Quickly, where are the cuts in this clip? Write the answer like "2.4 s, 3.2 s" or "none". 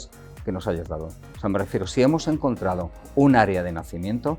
none